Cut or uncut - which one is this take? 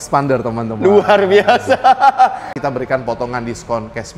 cut